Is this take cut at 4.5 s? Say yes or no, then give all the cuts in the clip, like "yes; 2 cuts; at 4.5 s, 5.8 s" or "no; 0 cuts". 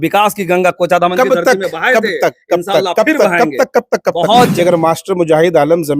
yes; 1 cut; at 4.5 s